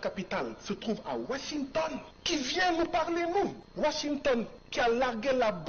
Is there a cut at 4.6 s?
yes; 3 cuts; at 2.1 s, 3.6 s, 4.6 s

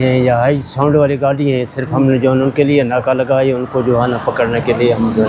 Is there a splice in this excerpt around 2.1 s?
no; 0 cuts

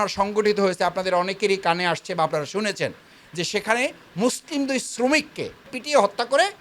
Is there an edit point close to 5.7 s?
yes; 1 cut; at 5.7 s

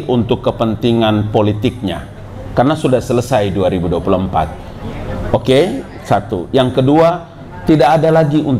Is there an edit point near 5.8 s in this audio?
no; 0 cuts

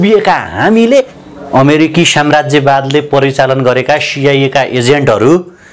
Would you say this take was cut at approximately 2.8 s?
no; 1 cut; at 1.2 s

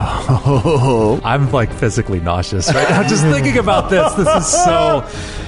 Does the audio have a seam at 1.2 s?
yes; 1 cut; at 1.2 s

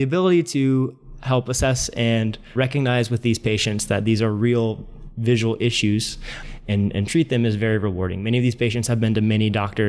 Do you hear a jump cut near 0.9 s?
no; 0 cuts

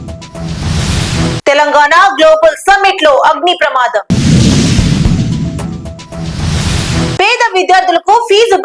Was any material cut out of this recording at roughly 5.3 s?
no; 1 cut; at 0.9 s

